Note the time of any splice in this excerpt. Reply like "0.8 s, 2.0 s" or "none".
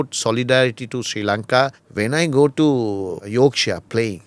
1.8 s, 3.2 s